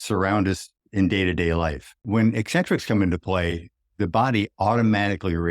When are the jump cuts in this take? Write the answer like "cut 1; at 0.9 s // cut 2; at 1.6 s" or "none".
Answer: cut 1; at 2.0 s